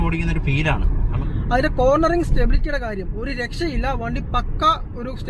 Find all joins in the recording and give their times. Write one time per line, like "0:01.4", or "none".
0:01.2

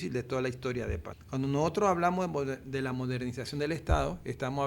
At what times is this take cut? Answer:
0:01.1

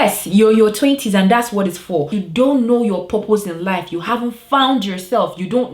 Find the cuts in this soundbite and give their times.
0:02.2

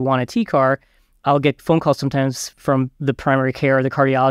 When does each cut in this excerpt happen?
0:01.2
0:02.9

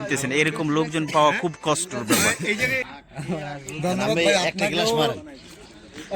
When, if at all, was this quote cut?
0:02.9

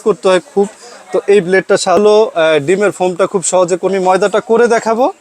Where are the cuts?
0:02.0
0:03.9

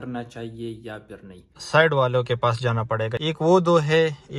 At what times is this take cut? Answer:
0:01.5
0:03.2

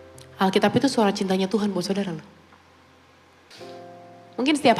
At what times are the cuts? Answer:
0:03.5

